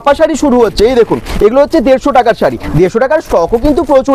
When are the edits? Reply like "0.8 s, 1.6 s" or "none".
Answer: none